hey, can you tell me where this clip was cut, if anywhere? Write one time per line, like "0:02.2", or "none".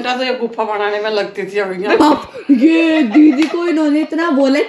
none